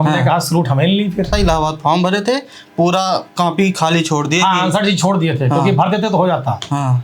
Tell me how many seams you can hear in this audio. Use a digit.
1